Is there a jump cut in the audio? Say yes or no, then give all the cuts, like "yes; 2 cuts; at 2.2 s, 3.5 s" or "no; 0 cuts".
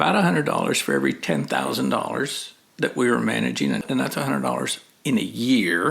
yes; 1 cut; at 3.8 s